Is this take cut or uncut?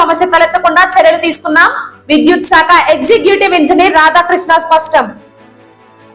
uncut